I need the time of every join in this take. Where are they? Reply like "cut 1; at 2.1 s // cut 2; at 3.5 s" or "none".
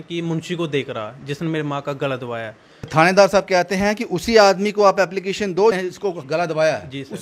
cut 1; at 2.9 s // cut 2; at 5.8 s